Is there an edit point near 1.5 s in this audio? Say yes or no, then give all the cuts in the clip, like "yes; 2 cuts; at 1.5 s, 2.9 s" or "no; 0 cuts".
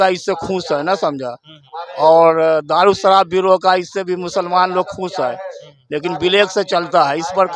no; 0 cuts